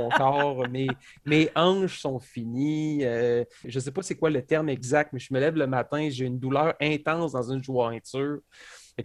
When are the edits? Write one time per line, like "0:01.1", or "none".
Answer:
0:03.7